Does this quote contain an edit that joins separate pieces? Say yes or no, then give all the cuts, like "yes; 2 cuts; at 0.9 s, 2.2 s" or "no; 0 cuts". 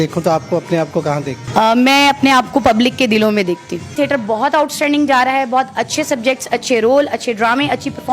yes; 2 cuts; at 1.4 s, 3.9 s